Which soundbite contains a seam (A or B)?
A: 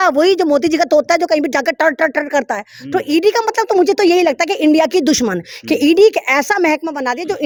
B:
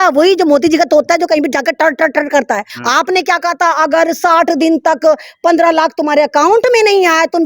B